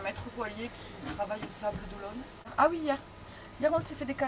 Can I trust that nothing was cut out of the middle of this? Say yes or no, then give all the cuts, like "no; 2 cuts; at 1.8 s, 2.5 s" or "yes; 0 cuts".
no; 1 cut; at 2.5 s